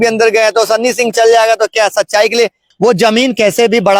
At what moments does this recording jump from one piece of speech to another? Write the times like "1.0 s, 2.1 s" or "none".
2.6 s